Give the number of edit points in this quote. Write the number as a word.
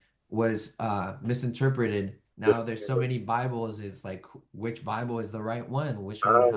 one